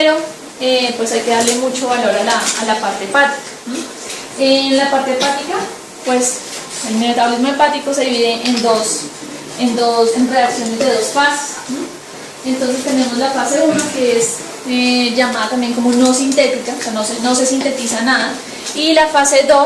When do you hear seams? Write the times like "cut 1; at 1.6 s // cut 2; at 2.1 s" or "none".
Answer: none